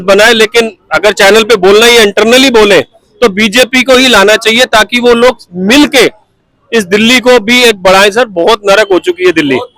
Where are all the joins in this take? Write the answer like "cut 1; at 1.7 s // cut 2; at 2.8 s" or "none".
none